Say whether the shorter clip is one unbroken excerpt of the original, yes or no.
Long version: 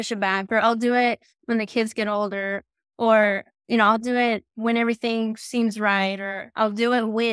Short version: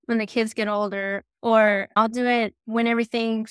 no